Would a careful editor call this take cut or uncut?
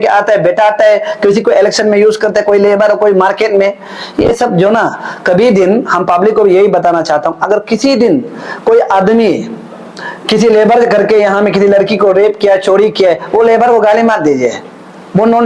uncut